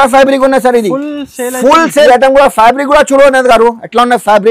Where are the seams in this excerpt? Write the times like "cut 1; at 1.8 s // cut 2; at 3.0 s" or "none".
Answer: cut 1; at 1.9 s